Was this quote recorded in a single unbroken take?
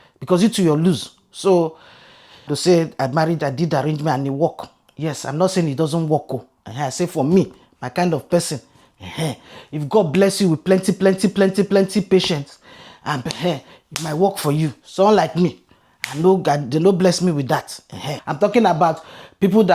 no; 2 cuts; at 2.5 s, 18.2 s

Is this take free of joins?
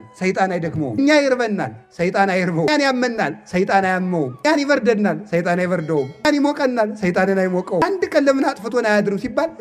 no; 5 cuts; at 1.0 s, 2.7 s, 4.4 s, 6.2 s, 7.8 s

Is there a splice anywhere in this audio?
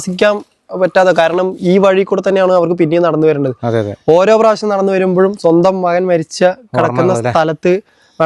no; 0 cuts

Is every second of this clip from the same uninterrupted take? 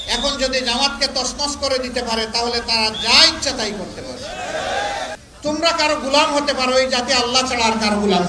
no; 1 cut; at 5.3 s

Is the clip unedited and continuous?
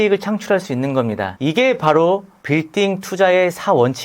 no; 1 cut; at 1.3 s

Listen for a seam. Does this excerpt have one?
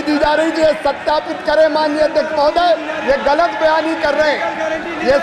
no; 0 cuts

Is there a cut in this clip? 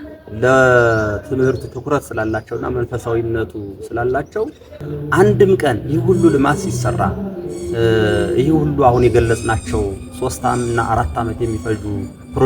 yes; 1 cut; at 4.9 s

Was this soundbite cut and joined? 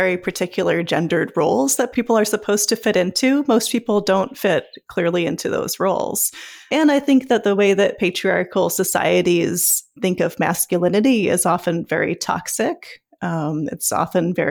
yes; 3 cuts; at 1.9 s, 6.7 s, 9.9 s

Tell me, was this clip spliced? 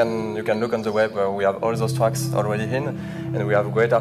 no; 0 cuts

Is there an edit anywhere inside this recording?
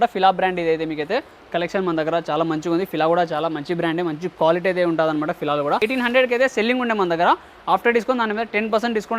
yes; 1 cut; at 5.8 s

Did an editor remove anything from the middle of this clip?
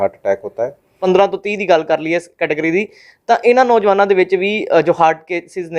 yes; 1 cut; at 1.0 s

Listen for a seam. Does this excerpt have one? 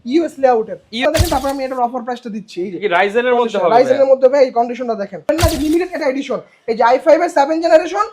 yes; 2 cuts; at 1.0 s, 5.3 s

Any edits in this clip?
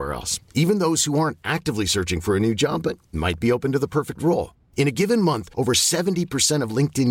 no; 0 cuts

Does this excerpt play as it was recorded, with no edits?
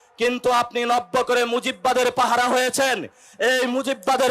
yes; 0 cuts

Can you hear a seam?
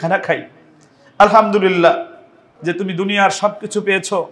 yes; 1 cut; at 2.5 s

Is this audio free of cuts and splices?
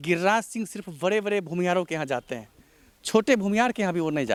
yes; 0 cuts

